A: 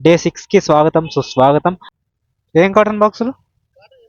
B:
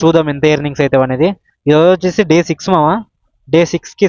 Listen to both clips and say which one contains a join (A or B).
A